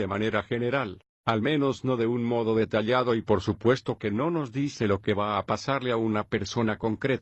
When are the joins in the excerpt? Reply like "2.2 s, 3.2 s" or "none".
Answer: none